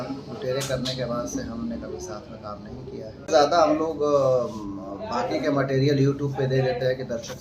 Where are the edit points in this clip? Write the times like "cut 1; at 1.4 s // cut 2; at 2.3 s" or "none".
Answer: cut 1; at 3.3 s

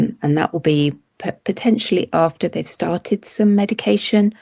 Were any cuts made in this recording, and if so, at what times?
none

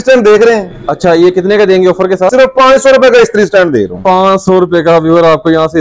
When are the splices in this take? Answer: cut 1; at 2.3 s

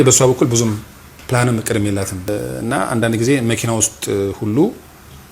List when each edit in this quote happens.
cut 1; at 2.3 s

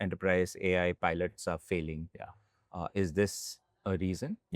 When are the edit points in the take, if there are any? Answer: none

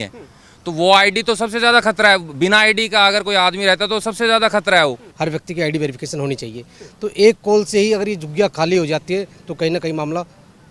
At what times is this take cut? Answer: cut 1; at 5.1 s

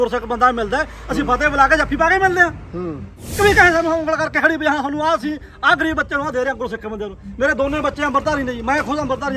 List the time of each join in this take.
cut 1; at 3.3 s

